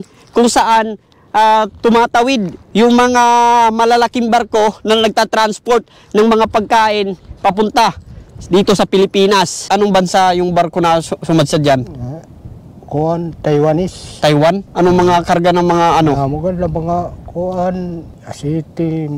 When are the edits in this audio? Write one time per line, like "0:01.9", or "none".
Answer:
0:09.6